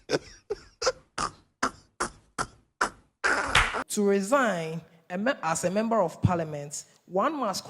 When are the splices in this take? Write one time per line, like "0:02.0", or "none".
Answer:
0:03.8